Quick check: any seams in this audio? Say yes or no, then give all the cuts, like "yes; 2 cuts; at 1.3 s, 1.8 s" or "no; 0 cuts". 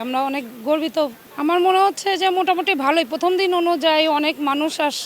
yes; 1 cut; at 1.2 s